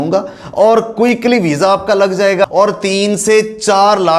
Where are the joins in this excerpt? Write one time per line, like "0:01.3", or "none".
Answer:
0:02.4